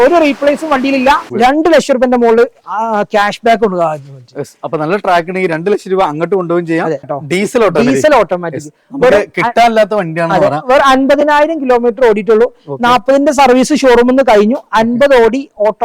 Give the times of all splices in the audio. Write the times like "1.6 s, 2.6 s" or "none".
1.3 s, 7.1 s